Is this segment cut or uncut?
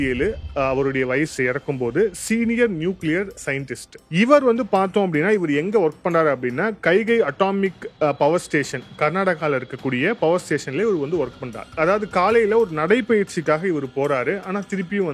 uncut